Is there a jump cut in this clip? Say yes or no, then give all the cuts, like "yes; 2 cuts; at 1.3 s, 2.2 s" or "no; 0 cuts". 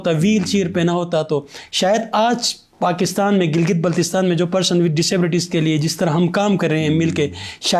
no; 0 cuts